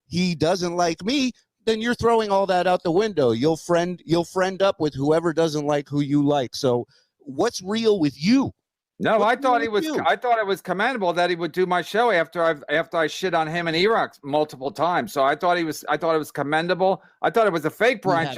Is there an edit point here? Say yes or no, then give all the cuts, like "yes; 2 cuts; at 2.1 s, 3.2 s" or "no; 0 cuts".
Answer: no; 0 cuts